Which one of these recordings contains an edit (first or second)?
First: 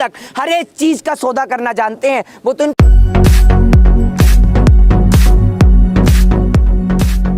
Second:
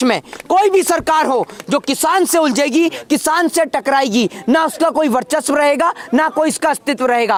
first